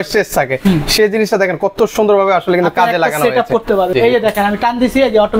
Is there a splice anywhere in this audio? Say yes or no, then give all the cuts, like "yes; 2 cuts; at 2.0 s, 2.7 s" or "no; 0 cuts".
yes; 1 cut; at 3.9 s